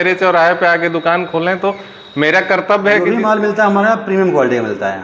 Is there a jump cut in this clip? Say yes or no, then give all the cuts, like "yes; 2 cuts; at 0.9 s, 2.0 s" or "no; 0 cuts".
yes; 1 cut; at 3.0 s